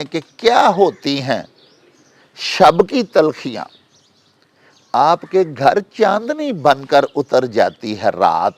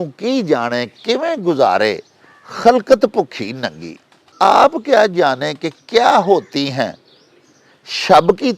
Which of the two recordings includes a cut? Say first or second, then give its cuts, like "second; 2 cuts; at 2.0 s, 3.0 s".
second; 1 cut; at 4.2 s